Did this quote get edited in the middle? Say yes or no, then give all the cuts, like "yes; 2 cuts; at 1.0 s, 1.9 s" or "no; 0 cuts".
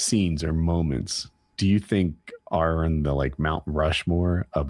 no; 0 cuts